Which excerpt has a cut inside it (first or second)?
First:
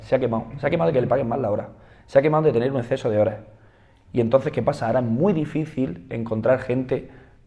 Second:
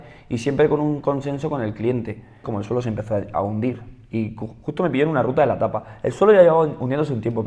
second